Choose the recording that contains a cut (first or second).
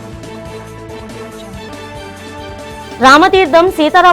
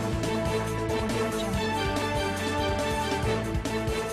first